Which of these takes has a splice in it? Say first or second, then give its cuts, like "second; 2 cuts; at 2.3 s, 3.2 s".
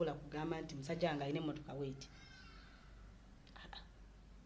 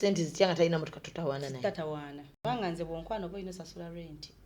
second; 1 cut; at 2.4 s